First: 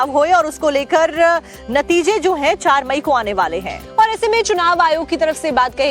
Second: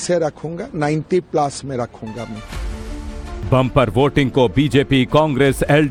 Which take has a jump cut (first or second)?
first